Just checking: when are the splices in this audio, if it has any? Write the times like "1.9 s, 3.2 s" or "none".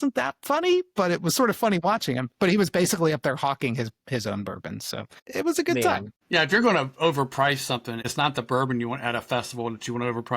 5.2 s, 6.1 s, 8.0 s